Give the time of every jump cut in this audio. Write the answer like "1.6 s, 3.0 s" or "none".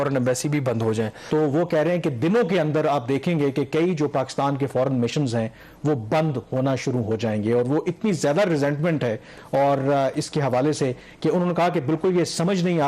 1.2 s